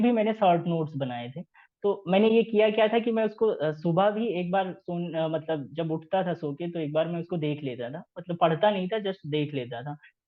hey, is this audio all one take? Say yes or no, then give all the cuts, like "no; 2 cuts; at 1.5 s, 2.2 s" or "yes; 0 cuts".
yes; 0 cuts